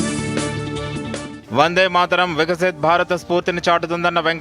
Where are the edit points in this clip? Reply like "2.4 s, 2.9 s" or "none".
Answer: none